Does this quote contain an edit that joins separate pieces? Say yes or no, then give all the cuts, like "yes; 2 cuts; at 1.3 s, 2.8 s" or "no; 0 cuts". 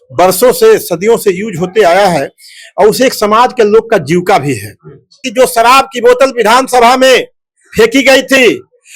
yes; 1 cut; at 5.3 s